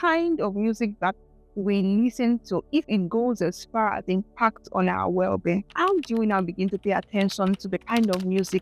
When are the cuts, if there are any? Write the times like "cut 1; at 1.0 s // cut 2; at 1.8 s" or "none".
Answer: cut 1; at 5.7 s